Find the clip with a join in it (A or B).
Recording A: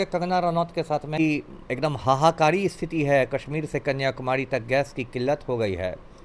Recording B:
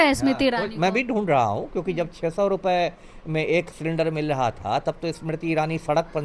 A